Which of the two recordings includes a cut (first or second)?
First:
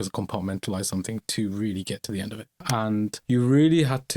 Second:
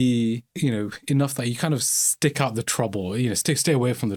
first